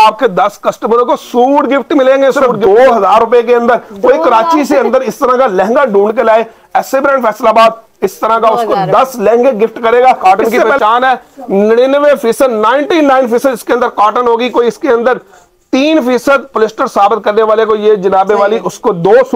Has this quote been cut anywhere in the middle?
yes; 2 cuts; at 2.5 s, 10.2 s

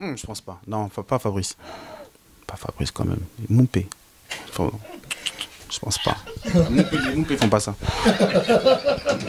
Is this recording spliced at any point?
no; 0 cuts

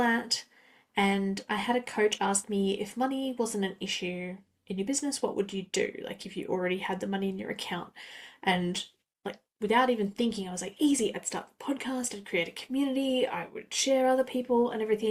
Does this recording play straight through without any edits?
yes; 0 cuts

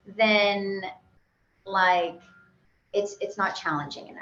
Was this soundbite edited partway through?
no; 0 cuts

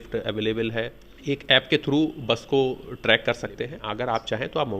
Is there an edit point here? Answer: yes; 2 cuts; at 1.1 s, 3.8 s

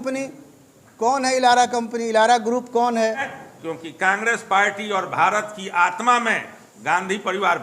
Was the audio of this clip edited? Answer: yes; 1 cut; at 3.3 s

